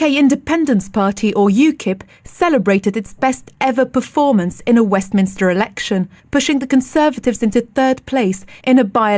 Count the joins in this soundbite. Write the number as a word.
zero